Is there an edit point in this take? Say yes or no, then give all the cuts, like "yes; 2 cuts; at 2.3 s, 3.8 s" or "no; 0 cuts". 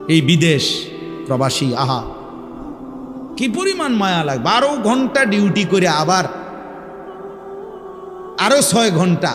yes; 4 cuts; at 2.1 s, 3.4 s, 6.9 s, 8.4 s